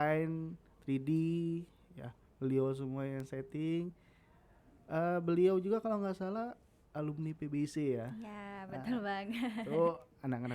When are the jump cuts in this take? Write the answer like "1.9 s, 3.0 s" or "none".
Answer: none

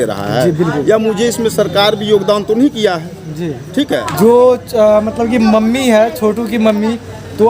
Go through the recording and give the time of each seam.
4.1 s

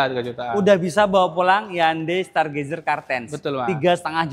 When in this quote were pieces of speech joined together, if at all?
none

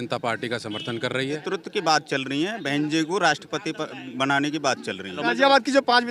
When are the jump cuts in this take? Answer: 1.4 s, 5.2 s

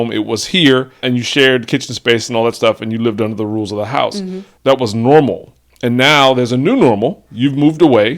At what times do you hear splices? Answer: 1.0 s

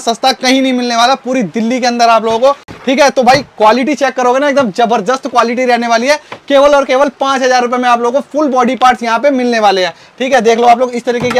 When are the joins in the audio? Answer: none

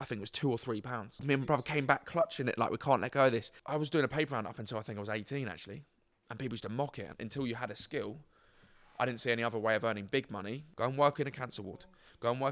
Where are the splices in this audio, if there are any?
1.2 s, 3.5 s, 7.2 s, 10.6 s

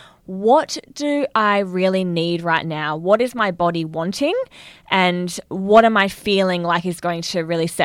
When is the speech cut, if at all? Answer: none

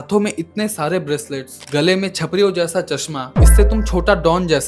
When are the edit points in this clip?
none

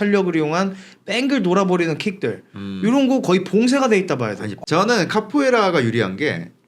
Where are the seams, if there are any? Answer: 4.6 s

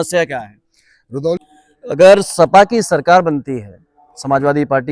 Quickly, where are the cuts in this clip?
1.4 s

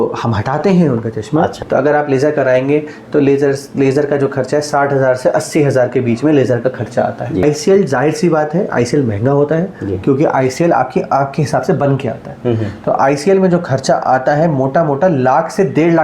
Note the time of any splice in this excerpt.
1.6 s, 7.4 s

